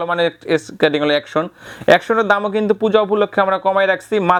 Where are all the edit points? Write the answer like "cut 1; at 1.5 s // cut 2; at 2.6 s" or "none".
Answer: none

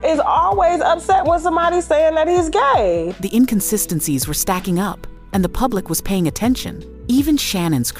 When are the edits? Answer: none

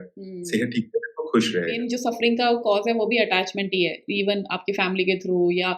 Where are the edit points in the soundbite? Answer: cut 1; at 1.8 s

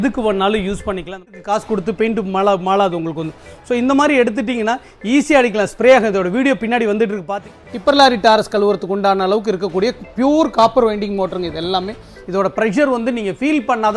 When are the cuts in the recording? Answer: cut 1; at 1.3 s // cut 2; at 7.4 s

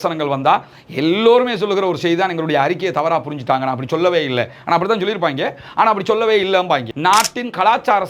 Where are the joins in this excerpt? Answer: cut 1; at 6.9 s

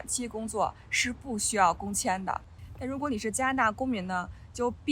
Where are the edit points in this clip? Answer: cut 1; at 2.5 s

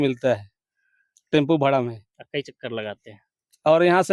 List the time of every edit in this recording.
none

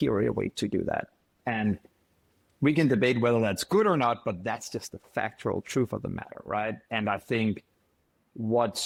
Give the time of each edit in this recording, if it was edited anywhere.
none

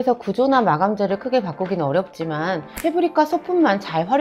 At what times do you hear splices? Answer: none

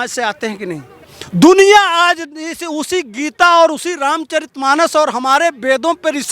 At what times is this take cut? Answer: cut 1; at 1.1 s

